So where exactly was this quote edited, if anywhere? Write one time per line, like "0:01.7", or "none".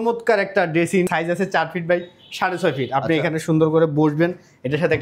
0:01.1